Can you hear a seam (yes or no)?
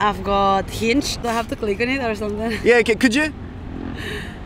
yes